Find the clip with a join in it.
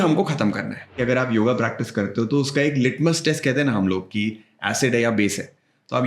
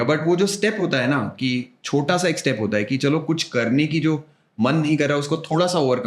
first; 1 cut; at 1.0 s

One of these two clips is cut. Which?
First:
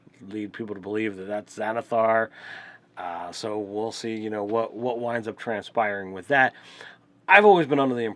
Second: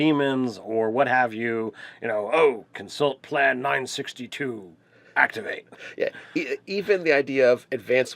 second; 1 cut; at 4.3 s

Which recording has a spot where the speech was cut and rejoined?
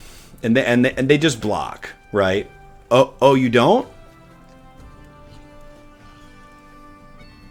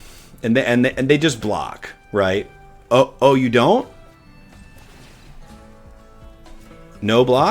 second; 1 cut; at 4.2 s

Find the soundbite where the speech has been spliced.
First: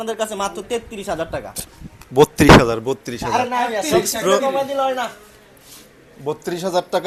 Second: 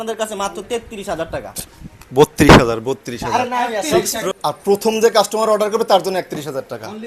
second; 1 cut; at 4.3 s

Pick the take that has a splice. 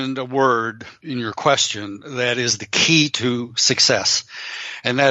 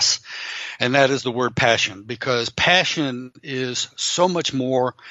first; 1 cut; at 1.0 s

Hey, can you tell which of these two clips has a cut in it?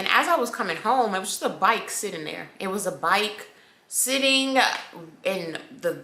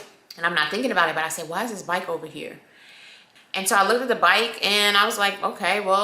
second; 1 cut; at 3.1 s

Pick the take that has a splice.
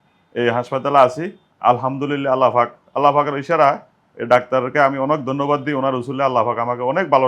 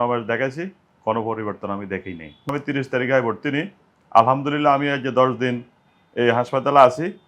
second; 1 cut; at 2.5 s

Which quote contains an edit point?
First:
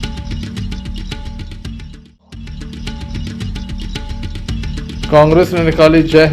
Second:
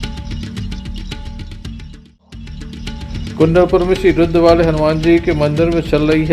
first; 2 cuts; at 2.9 s, 4.6 s

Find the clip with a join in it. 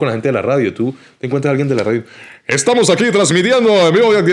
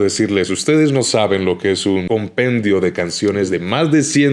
second; 1 cut; at 2.1 s

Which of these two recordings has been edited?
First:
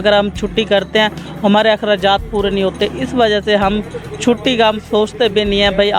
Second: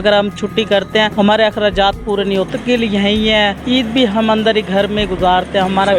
second; 3 cuts; at 1.1 s, 2.5 s, 3.6 s

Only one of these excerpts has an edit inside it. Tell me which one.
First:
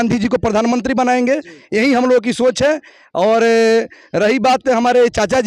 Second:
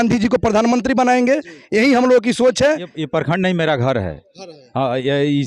second; 1 cut; at 2.9 s

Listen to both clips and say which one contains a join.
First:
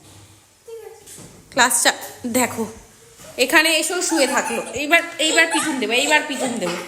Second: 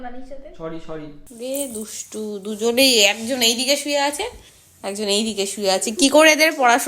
second; 1 cut; at 1.2 s

